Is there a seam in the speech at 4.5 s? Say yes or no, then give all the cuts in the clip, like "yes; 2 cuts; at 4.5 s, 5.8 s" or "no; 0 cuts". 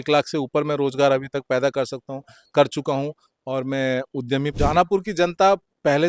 yes; 1 cut; at 4.5 s